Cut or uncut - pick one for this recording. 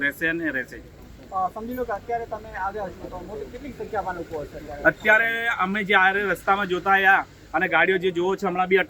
uncut